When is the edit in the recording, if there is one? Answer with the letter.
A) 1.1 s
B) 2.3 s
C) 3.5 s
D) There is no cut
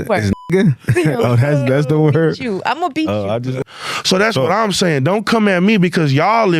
C